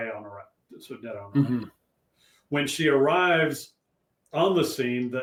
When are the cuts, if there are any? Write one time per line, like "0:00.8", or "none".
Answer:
none